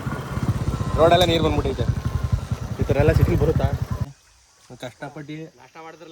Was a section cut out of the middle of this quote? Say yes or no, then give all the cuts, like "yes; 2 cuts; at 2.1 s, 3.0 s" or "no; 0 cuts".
yes; 1 cut; at 4.1 s